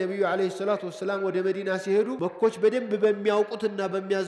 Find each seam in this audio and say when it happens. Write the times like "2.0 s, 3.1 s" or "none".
2.1 s

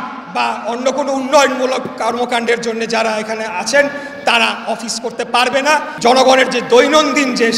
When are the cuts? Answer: 5.9 s

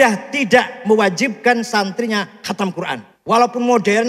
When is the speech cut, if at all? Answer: 3.1 s

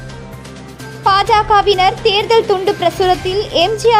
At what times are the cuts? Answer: 1.0 s

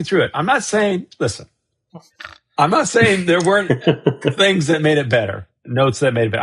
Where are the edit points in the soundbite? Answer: none

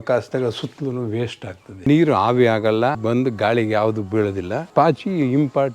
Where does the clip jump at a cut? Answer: 1.9 s, 3.0 s, 4.7 s

